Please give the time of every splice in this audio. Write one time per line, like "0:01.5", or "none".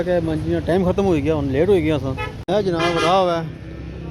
0:02.5